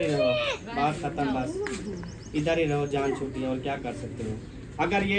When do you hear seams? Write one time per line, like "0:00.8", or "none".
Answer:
none